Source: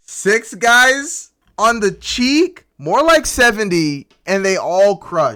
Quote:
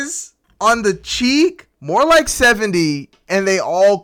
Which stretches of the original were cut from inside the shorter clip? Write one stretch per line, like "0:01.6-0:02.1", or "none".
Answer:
none